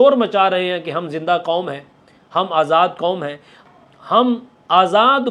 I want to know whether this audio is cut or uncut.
cut